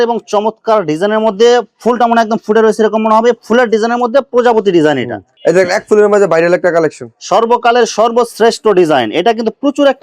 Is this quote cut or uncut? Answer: cut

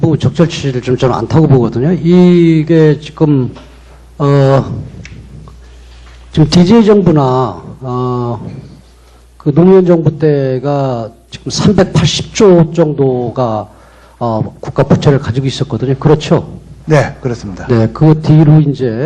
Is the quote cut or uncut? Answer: cut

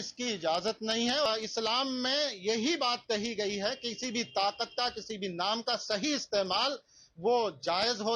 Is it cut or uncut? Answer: cut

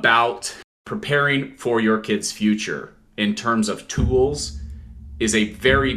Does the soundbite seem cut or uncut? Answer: cut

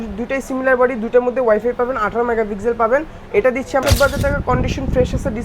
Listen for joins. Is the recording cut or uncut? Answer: cut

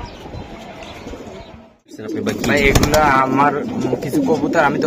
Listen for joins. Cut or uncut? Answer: cut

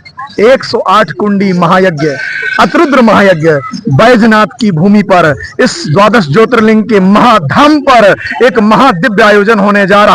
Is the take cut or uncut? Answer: uncut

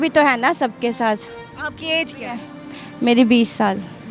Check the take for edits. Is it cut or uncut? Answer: uncut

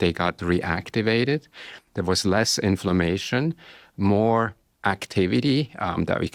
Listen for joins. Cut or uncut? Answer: uncut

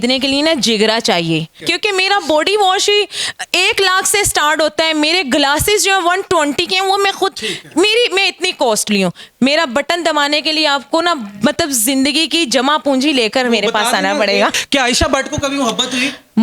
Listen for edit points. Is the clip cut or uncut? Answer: cut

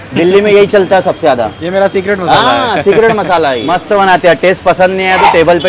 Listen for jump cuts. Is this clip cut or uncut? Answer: cut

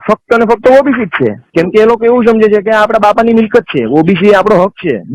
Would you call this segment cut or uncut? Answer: cut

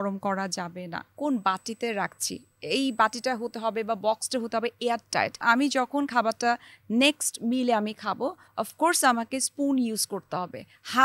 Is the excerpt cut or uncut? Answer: cut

